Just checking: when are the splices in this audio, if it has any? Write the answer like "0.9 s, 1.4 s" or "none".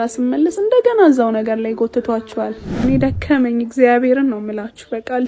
2.8 s